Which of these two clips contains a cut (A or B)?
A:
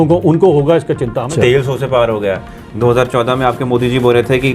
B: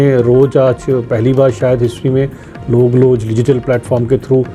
A